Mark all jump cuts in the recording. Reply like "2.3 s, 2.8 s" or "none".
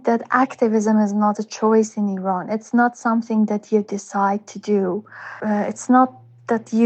none